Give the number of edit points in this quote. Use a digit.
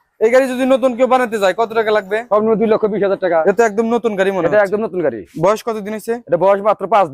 3